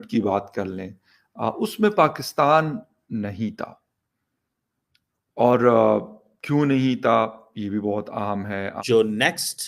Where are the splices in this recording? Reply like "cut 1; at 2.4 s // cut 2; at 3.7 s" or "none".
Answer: cut 1; at 8.8 s